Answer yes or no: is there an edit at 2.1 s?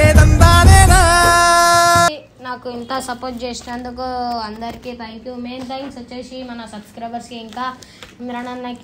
yes